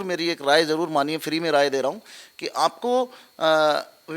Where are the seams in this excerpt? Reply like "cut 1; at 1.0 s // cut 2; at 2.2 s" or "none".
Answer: none